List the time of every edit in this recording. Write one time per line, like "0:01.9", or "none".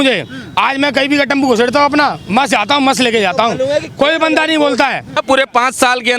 0:05.2